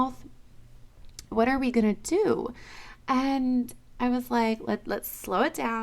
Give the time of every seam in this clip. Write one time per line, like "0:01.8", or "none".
0:01.3